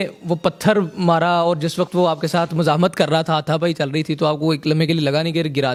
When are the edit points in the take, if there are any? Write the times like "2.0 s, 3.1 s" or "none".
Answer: none